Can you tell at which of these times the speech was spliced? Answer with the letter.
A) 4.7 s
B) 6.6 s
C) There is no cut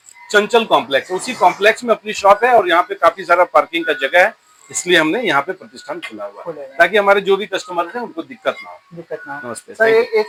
C